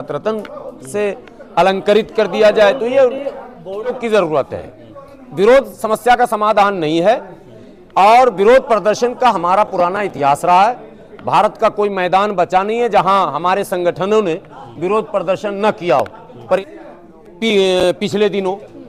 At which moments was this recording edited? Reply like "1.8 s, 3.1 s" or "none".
4.0 s, 16.6 s